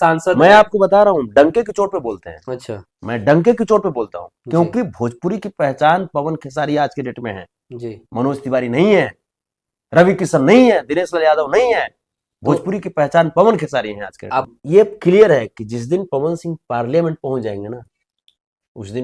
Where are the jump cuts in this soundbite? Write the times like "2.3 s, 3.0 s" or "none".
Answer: 14.5 s

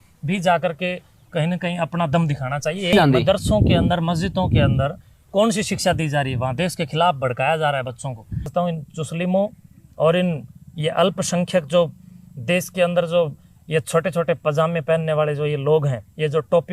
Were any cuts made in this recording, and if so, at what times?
2.9 s, 8.5 s

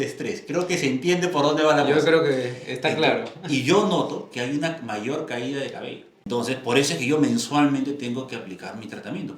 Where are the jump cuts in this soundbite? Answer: 6.2 s

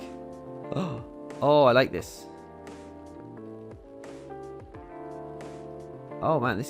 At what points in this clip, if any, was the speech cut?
2.0 s

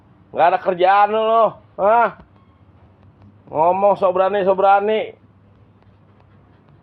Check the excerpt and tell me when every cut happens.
none

